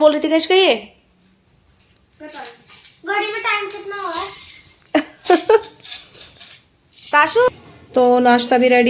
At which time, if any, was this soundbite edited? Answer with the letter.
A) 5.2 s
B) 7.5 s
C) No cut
B